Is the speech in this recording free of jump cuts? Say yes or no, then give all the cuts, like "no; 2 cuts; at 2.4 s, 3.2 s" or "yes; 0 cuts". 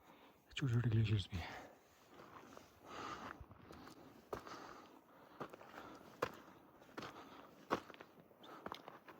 yes; 0 cuts